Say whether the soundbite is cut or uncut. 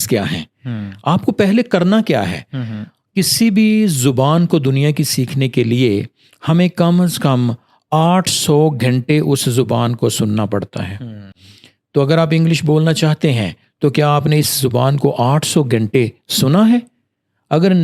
uncut